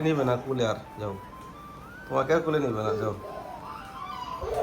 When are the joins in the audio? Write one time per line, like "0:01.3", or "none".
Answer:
none